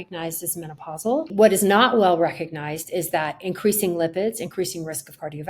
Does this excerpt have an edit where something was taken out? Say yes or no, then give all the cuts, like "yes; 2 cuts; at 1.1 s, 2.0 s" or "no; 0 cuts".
yes; 1 cut; at 1.3 s